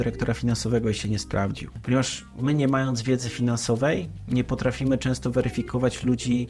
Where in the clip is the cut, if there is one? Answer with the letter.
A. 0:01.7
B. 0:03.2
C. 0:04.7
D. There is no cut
A